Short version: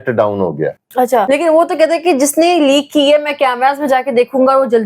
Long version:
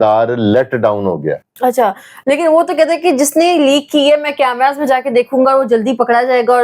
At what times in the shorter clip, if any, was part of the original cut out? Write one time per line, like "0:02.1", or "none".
0:01.3